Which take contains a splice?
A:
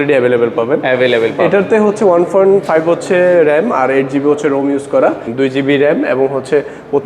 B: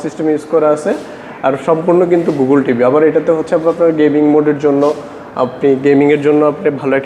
A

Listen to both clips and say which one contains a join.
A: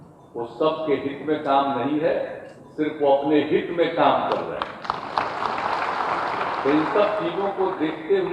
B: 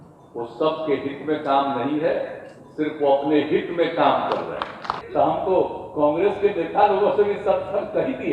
B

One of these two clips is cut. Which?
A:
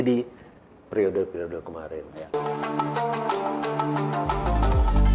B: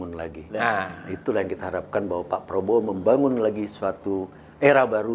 A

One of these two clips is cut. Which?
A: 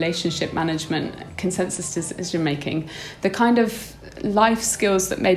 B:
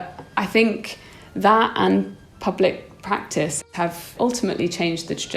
B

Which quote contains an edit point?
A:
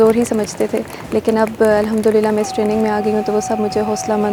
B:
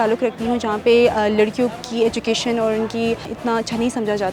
B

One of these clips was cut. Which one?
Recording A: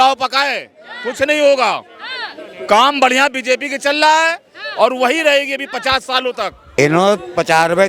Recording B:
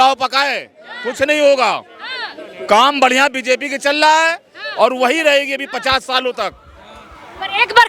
A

